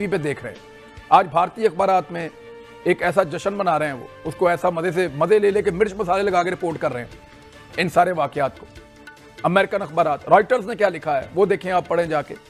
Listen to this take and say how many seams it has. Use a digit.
0